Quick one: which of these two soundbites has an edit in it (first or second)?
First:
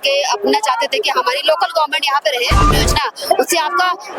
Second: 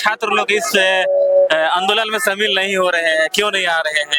first